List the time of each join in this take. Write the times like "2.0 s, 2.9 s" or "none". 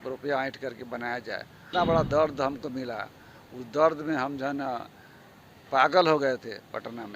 1.7 s

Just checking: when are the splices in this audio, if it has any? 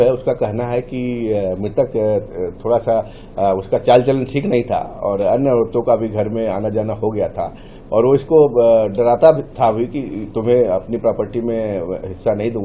none

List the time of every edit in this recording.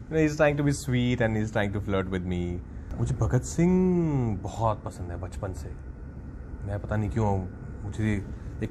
2.8 s

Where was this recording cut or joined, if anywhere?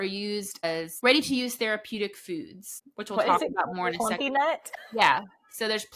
0.9 s

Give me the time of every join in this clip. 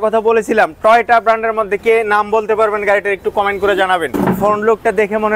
4.1 s

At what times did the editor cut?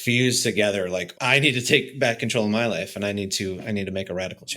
1.1 s

